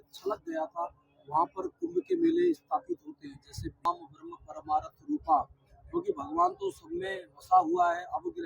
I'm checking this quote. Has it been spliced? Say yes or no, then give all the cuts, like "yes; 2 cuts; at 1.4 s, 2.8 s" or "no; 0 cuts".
yes; 1 cut; at 3.8 s